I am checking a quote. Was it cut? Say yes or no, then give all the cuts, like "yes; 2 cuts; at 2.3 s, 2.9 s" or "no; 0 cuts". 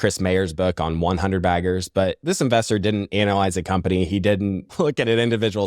yes; 2 cuts; at 2.2 s, 4.6 s